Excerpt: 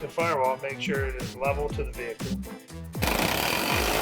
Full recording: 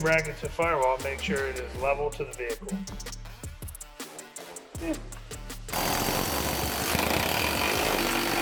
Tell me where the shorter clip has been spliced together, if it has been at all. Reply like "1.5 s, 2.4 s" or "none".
3.0 s

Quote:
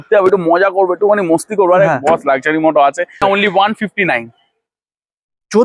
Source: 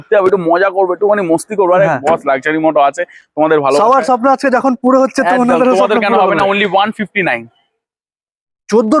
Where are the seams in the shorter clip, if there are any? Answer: 3.2 s

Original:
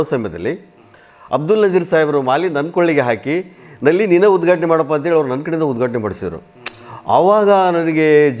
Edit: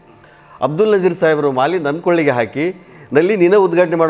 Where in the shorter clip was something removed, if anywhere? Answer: none

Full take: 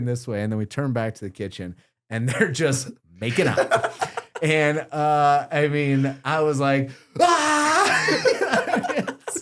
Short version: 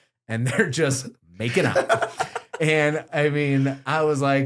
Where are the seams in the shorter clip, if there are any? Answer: 3.1 s

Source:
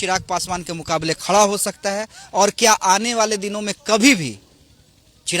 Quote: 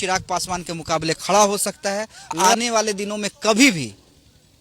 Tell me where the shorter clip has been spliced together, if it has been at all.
2.3 s

